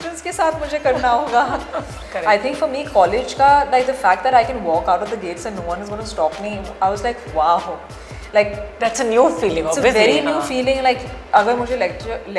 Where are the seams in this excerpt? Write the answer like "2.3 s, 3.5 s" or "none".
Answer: 2.0 s